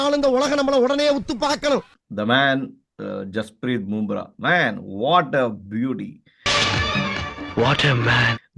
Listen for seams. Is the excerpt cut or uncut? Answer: cut